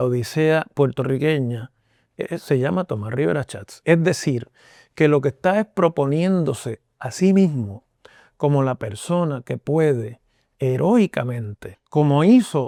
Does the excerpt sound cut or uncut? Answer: uncut